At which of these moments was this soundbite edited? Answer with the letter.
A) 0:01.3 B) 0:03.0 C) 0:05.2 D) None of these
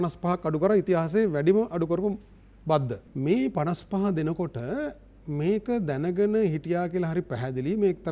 B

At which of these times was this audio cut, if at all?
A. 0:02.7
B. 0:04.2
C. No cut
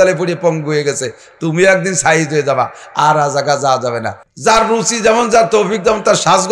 B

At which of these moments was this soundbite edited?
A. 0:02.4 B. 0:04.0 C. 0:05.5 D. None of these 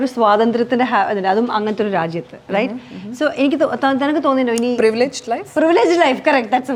D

